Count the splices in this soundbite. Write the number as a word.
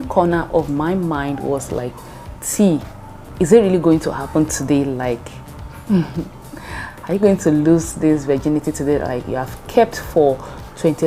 zero